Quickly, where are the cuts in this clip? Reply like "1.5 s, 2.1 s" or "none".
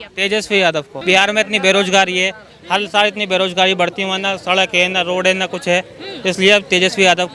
0.9 s